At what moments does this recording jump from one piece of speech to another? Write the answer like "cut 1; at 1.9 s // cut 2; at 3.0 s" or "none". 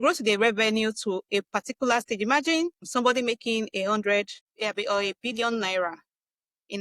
none